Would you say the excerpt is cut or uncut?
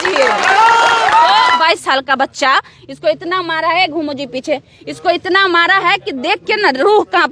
cut